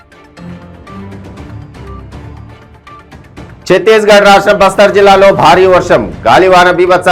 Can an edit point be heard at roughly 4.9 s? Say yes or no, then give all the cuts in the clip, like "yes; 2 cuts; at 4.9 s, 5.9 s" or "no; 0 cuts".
no; 1 cut; at 3.2 s